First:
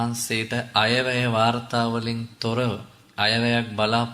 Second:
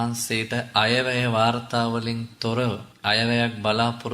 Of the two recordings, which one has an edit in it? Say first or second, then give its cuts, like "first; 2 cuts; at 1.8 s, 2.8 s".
second; 1 cut; at 2.9 s